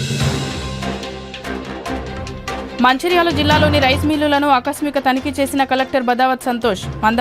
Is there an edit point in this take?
no; 0 cuts

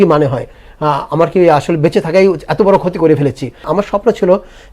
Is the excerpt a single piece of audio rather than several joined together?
no; 1 cut; at 3.6 s

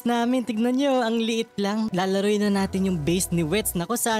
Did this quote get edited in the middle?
yes; 1 cut; at 1.9 s

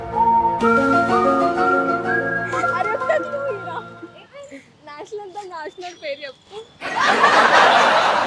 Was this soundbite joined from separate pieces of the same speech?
no; 0 cuts

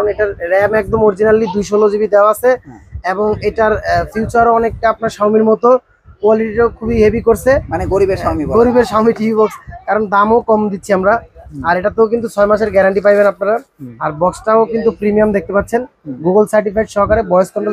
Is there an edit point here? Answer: no; 0 cuts

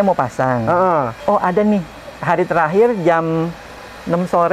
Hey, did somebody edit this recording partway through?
yes; 1 cut; at 1.1 s

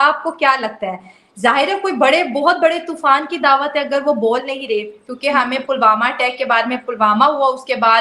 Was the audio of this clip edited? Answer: no; 0 cuts

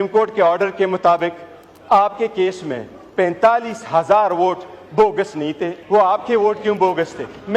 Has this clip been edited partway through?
yes; 1 cut; at 5.7 s

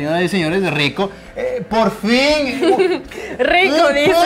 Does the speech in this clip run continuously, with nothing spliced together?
yes; 0 cuts

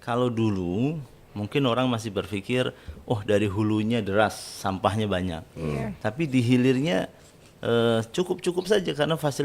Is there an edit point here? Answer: no; 0 cuts

